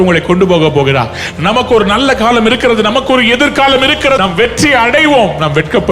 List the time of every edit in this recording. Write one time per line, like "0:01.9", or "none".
0:04.2